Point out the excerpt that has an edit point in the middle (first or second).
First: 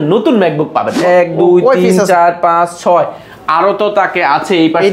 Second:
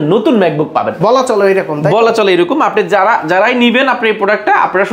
first